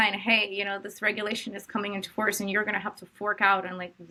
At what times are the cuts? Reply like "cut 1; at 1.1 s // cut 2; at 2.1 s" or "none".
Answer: none